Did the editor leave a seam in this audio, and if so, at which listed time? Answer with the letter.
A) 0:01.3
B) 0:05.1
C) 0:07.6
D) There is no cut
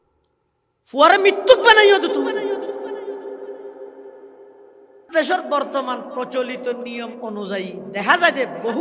B